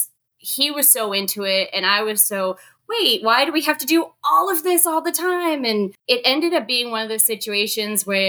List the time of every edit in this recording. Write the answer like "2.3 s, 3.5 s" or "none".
6.0 s